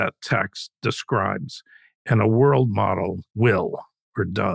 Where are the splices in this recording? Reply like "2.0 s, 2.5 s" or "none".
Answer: 3.2 s